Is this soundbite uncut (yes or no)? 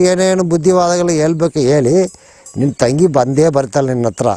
yes